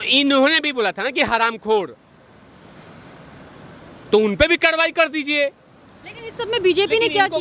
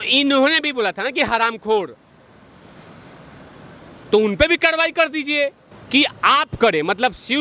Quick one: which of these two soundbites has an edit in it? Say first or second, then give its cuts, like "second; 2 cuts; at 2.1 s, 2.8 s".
second; 1 cut; at 5.7 s